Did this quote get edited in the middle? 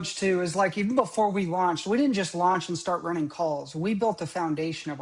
no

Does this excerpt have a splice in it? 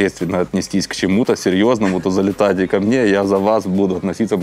no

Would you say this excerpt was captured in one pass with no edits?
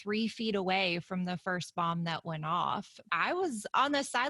no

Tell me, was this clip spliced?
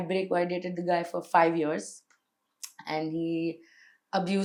no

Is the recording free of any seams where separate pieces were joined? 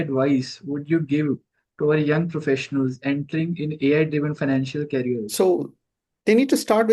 no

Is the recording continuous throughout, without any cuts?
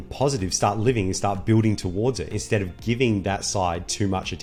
yes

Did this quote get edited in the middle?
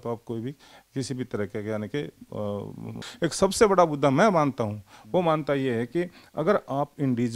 yes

